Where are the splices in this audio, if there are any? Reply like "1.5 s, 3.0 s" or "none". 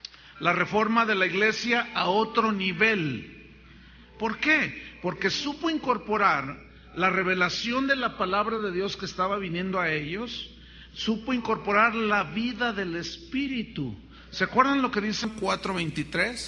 12.0 s